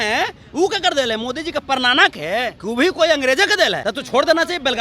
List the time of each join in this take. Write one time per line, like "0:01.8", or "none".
0:02.6
0:03.8